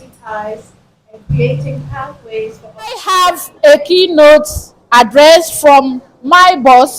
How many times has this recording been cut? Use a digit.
1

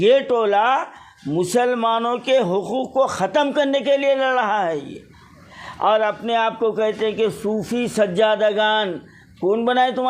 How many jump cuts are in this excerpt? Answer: 1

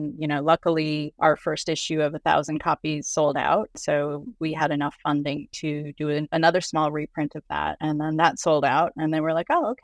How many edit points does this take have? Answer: 4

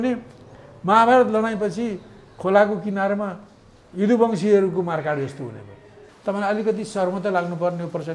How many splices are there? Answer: 1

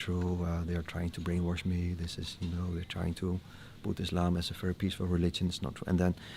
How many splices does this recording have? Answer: 0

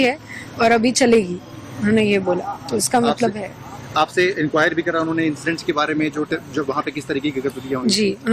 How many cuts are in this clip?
0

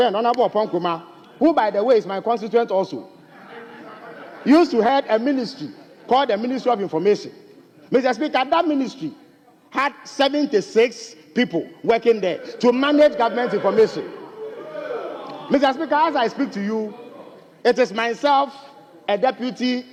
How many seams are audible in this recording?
0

